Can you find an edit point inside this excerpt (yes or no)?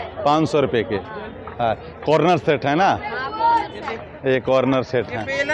no